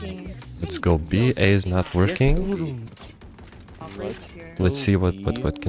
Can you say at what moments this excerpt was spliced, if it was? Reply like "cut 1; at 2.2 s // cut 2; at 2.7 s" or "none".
none